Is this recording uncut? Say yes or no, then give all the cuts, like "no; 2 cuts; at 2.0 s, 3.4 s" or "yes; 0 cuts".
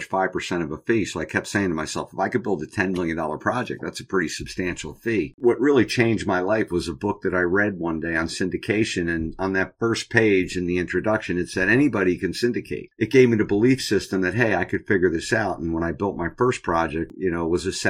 no; 3 cuts; at 5.3 s, 12.7 s, 17.1 s